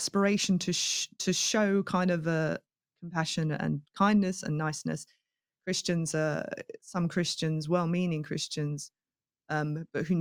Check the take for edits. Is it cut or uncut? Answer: uncut